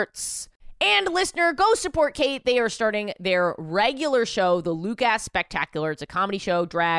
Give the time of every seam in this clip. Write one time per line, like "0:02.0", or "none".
none